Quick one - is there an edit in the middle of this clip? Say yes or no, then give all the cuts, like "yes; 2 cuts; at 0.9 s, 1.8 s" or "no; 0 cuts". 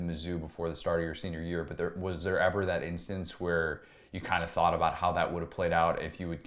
no; 0 cuts